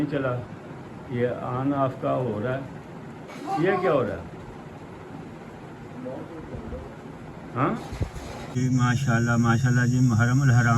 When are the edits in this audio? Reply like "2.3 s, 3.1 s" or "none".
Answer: 8.5 s